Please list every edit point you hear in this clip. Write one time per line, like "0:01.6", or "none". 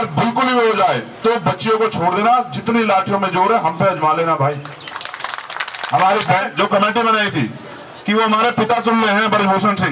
0:06.3